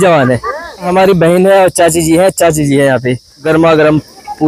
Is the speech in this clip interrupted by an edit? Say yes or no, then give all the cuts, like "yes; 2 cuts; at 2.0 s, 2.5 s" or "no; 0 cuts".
yes; 2 cuts; at 0.9 s, 3.4 s